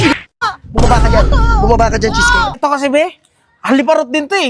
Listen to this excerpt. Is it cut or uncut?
cut